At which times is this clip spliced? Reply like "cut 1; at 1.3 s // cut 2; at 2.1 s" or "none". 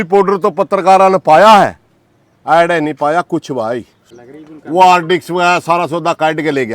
cut 1; at 4.0 s